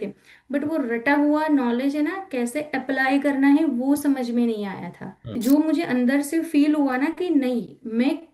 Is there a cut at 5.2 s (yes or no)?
yes